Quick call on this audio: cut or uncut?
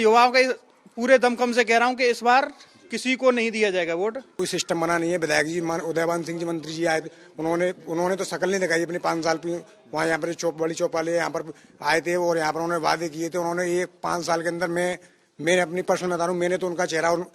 cut